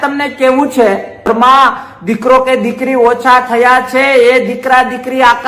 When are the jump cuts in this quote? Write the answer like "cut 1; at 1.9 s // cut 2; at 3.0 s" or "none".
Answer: cut 1; at 1.3 s